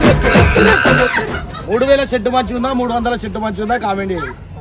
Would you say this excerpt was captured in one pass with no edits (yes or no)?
no